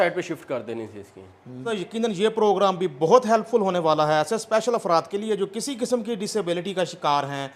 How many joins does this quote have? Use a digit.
1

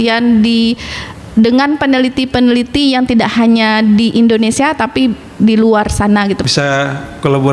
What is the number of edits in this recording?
1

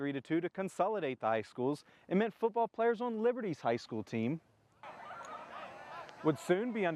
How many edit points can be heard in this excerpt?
0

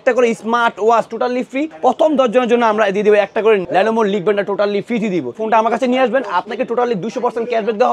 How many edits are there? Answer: 3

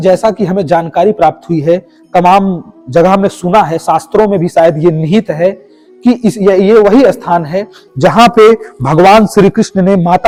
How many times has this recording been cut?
0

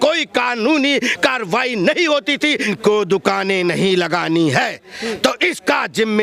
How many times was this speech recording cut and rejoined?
1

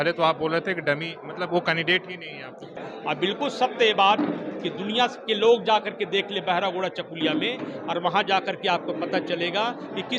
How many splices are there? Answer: 1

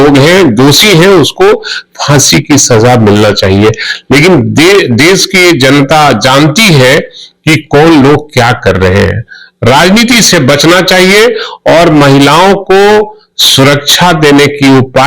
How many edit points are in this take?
0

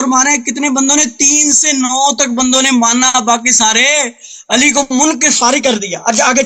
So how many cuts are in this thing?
0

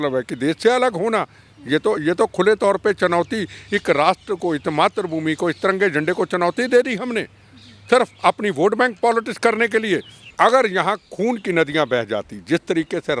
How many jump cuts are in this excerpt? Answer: 1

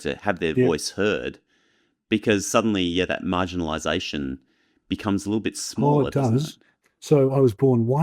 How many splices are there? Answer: 1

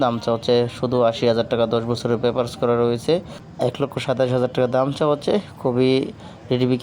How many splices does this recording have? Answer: 1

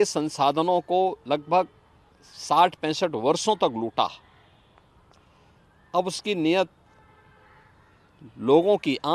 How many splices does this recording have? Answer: 0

